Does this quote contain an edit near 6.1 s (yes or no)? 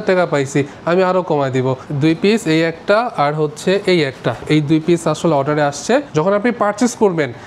yes